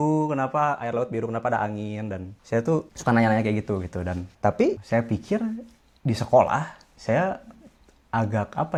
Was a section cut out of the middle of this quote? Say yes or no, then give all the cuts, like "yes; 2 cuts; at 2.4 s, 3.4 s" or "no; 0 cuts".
no; 0 cuts